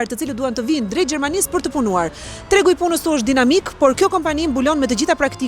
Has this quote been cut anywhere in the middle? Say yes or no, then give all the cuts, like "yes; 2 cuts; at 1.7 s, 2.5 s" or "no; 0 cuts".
no; 0 cuts